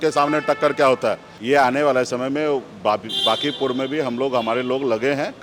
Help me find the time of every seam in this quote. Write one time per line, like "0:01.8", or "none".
0:01.3